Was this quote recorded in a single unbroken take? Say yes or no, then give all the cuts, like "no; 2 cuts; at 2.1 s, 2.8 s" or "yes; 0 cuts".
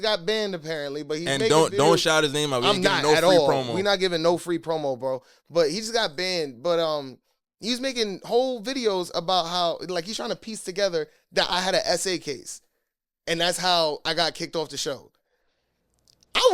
yes; 0 cuts